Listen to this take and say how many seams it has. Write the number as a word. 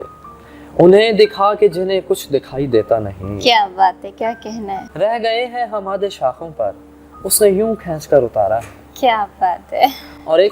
one